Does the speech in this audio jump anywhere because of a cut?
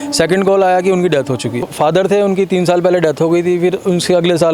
yes; 1 cut; at 1.7 s

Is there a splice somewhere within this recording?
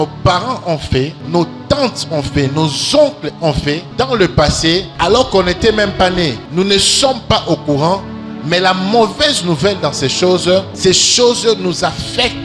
yes; 5 cuts; at 1.2 s, 3.9 s, 4.9 s, 6.4 s, 10.7 s

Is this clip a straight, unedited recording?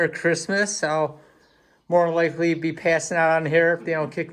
yes; 0 cuts

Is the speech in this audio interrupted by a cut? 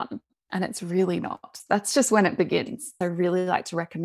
yes; 2 cuts; at 1.6 s, 2.9 s

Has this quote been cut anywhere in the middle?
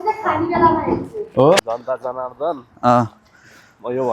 yes; 1 cut; at 1.7 s

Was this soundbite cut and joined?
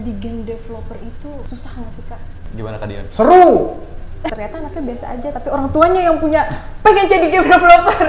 yes; 3 cuts; at 1.5 s, 2.4 s, 4.3 s

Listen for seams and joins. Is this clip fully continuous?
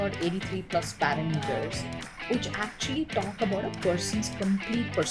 yes; 0 cuts

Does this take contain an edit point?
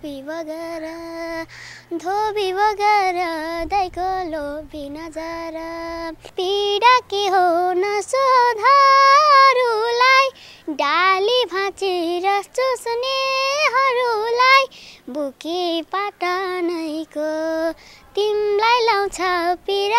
yes; 1 cut; at 6.3 s

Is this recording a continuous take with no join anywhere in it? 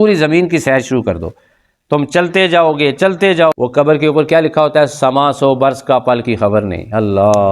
no; 1 cut; at 3.6 s

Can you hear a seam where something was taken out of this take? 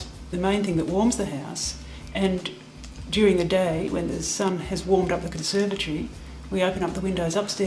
no; 0 cuts

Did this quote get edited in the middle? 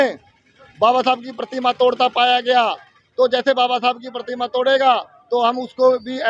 no; 0 cuts

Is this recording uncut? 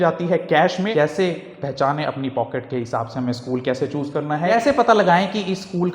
no; 2 cuts; at 0.9 s, 4.5 s

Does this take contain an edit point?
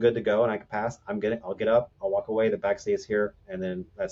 no; 0 cuts

